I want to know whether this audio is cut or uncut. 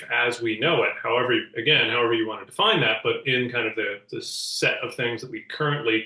uncut